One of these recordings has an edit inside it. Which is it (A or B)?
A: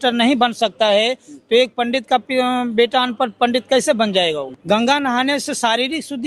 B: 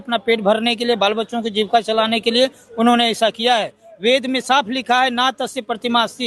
A